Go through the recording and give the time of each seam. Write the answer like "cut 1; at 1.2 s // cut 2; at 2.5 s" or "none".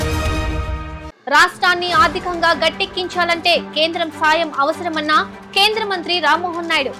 cut 1; at 1.0 s